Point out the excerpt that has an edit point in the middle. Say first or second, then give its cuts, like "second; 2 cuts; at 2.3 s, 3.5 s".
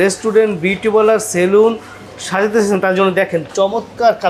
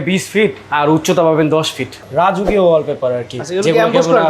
second; 1 cut; at 2.0 s